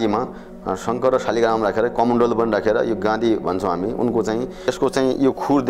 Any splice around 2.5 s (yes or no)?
no